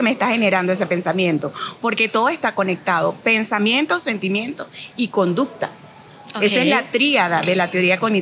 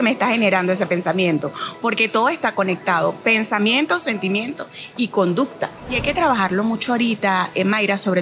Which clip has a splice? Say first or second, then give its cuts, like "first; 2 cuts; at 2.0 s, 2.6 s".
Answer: second; 1 cut; at 5.9 s